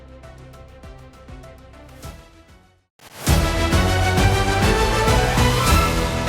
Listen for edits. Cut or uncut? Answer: cut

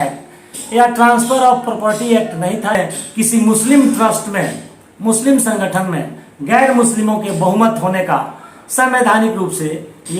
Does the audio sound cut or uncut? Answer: cut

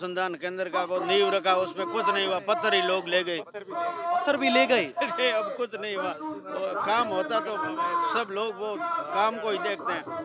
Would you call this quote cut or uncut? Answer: uncut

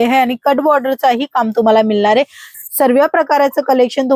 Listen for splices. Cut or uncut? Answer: cut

